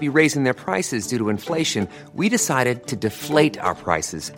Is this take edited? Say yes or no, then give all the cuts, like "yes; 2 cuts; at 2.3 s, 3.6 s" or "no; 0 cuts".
no; 0 cuts